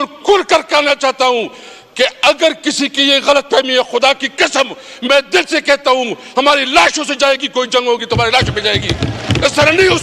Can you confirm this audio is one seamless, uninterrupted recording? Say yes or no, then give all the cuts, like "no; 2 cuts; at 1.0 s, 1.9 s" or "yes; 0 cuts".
yes; 0 cuts